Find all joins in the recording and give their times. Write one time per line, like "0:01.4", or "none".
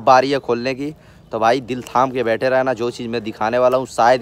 none